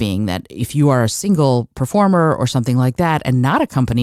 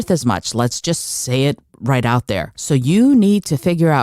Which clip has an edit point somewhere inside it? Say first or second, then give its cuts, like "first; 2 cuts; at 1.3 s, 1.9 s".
second; 1 cut; at 2.5 s